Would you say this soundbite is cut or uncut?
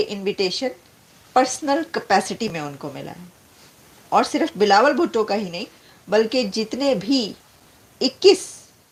uncut